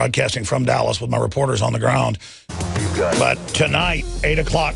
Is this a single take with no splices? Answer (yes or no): yes